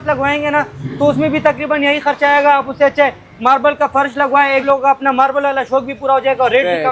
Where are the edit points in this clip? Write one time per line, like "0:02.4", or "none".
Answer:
0:04.6